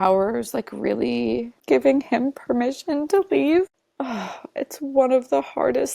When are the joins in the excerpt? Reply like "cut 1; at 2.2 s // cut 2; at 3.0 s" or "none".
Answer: cut 1; at 1.6 s